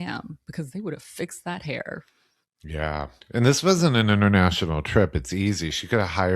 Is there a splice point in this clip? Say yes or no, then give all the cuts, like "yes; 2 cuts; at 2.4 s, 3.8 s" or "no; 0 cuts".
yes; 1 cut; at 3.2 s